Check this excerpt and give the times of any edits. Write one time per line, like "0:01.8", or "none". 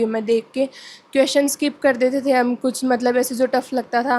none